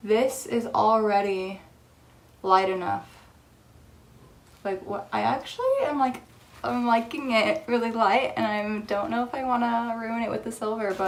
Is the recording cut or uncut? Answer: uncut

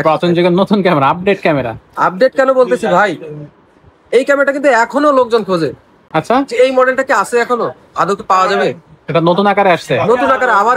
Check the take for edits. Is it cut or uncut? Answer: uncut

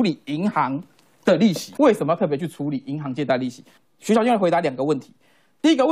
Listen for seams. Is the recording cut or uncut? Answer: cut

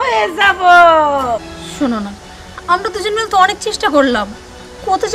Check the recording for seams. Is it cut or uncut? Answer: cut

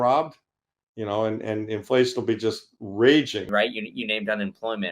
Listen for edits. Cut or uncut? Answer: cut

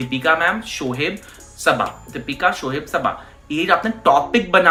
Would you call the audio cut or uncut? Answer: uncut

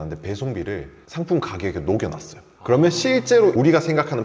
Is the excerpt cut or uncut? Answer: uncut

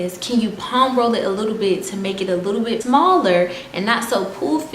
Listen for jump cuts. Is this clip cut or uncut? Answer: cut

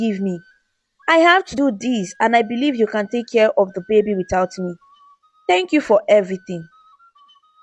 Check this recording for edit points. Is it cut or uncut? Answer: cut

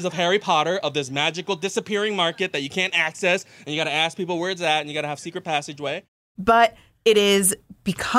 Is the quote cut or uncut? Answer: uncut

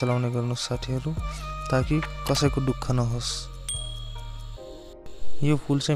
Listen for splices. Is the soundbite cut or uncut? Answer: uncut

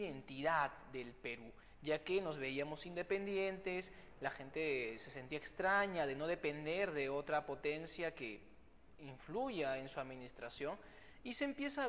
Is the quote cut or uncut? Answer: cut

